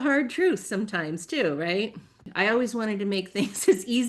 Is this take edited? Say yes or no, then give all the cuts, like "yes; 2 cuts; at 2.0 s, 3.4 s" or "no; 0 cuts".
yes; 1 cut; at 2.2 s